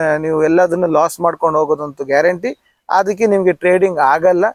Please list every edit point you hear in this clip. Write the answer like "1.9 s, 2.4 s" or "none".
none